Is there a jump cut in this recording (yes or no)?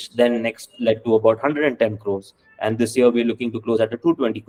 no